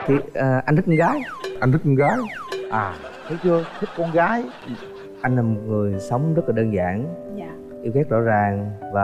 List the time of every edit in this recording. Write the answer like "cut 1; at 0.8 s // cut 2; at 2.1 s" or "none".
cut 1; at 4.6 s